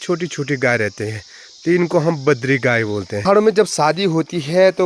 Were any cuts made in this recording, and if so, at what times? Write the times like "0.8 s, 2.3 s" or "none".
3.1 s